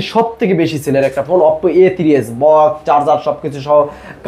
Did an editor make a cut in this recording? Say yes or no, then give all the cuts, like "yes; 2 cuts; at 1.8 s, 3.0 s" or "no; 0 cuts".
no; 0 cuts